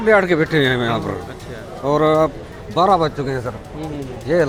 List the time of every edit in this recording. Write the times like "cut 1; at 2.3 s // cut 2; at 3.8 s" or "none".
none